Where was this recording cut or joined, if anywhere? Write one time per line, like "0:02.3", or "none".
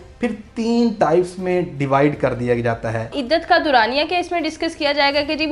0:03.2